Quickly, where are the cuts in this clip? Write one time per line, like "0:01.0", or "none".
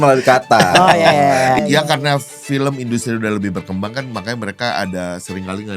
0:01.6